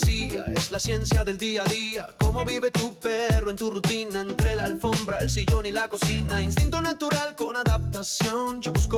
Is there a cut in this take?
no; 0 cuts

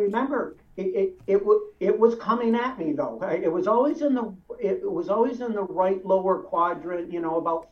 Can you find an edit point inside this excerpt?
no; 0 cuts

